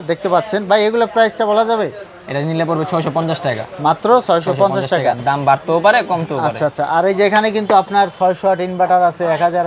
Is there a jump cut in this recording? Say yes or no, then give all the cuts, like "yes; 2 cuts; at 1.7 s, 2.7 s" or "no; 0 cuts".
no; 0 cuts